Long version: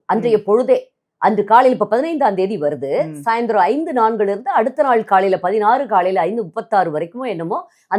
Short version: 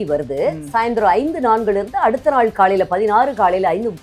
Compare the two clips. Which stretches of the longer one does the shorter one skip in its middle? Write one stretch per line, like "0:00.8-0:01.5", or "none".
none

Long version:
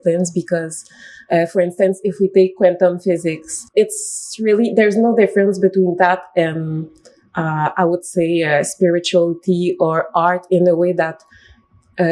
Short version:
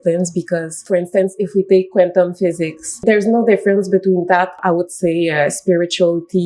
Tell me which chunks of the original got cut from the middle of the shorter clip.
0:00.8-0:01.5
0:03.7-0:04.7
0:06.3-0:07.7

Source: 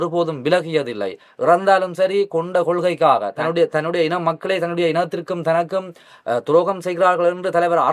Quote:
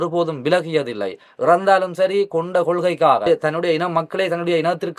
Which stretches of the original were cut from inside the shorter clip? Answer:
0:03.2-0:03.5

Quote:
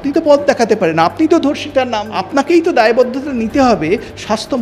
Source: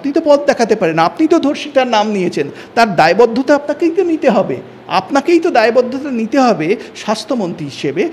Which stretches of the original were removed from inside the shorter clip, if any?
0:02.0-0:04.8

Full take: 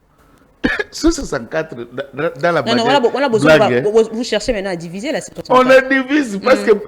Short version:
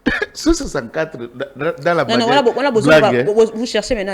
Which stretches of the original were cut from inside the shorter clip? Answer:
none

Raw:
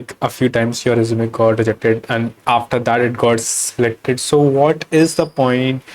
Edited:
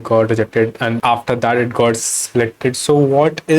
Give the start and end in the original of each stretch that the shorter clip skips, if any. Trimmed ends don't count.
0:02.3-0:02.4

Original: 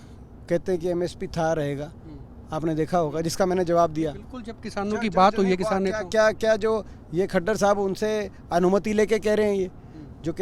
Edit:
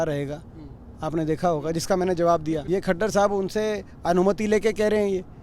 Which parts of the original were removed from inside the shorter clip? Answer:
0:04.1-0:07.1

